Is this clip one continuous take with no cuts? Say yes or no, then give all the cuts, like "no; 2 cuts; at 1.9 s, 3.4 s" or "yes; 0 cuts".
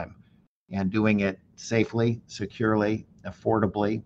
yes; 0 cuts